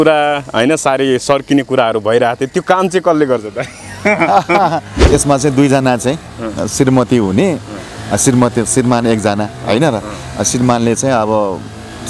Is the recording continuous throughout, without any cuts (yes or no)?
no